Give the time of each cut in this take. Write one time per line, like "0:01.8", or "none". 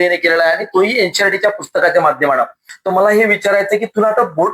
0:02.7